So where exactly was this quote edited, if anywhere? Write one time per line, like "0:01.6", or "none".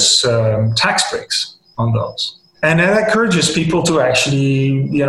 0:02.1